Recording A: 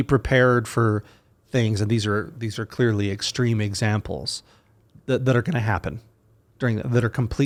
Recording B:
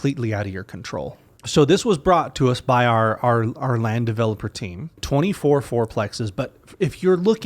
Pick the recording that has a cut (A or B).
B